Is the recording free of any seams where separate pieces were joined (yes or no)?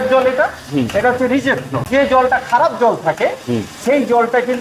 no